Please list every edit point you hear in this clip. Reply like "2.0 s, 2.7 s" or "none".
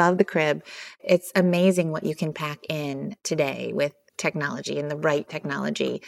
1.0 s, 3.2 s